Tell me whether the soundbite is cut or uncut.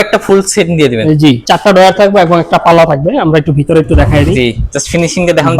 cut